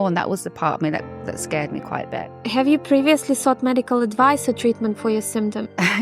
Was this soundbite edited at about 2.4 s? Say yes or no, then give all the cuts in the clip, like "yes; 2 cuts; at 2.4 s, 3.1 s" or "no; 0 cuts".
no; 0 cuts